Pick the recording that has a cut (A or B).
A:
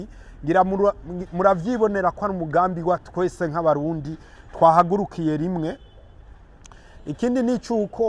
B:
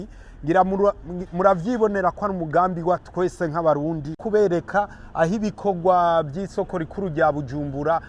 B